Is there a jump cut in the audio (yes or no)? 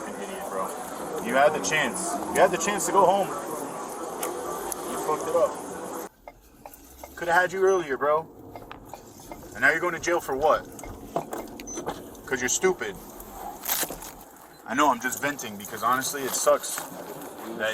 yes